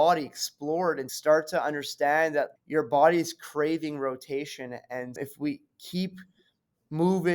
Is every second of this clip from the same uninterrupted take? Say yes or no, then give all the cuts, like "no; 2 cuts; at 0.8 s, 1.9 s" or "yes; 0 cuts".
no; 2 cuts; at 1.1 s, 2.5 s